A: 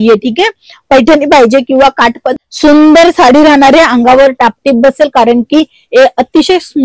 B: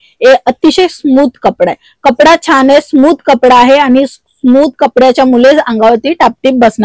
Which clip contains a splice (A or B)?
A